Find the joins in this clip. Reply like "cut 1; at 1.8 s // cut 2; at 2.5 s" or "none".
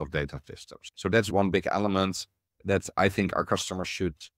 cut 1; at 1.2 s